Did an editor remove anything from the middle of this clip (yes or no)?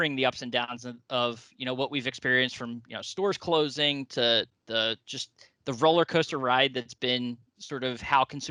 no